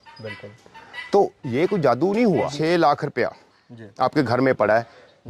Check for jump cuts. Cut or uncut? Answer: cut